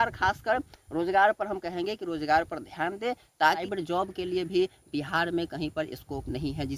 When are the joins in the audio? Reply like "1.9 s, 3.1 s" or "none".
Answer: 3.6 s